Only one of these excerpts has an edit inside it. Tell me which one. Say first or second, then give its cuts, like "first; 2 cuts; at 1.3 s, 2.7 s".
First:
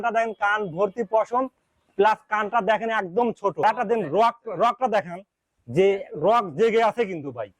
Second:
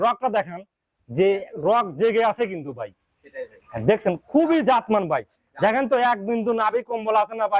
first; 1 cut; at 3.6 s